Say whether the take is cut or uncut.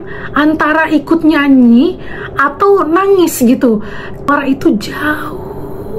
cut